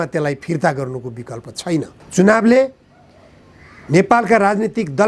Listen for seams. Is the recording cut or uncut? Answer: cut